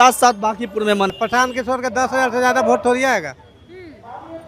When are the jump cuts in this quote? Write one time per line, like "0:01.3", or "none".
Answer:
0:01.1